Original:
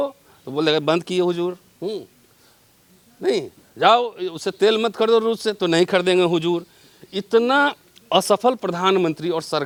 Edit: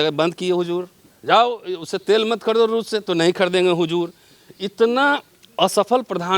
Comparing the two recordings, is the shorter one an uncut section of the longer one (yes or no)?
no